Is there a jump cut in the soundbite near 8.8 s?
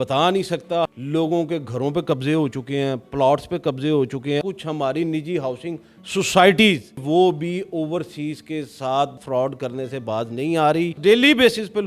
no; 4 cuts; at 0.9 s, 4.4 s, 7.0 s, 11.0 s

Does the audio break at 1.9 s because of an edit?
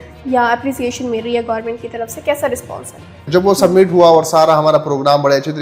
no; 1 cut; at 3.3 s

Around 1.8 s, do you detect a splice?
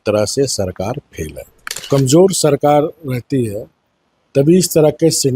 yes; 1 cut; at 1.8 s

